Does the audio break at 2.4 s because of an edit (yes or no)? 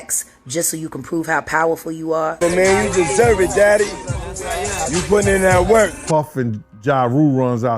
yes